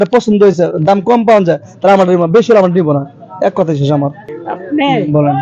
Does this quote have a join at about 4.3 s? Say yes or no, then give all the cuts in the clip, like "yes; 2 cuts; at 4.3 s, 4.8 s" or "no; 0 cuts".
yes; 1 cut; at 4.3 s